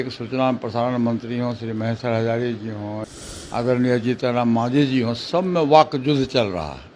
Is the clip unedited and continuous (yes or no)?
no